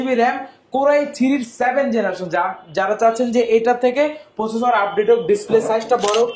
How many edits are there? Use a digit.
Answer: 0